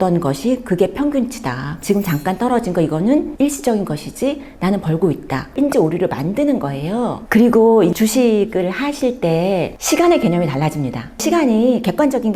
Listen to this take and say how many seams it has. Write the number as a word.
three